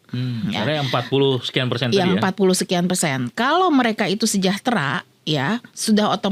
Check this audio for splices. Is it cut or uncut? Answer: uncut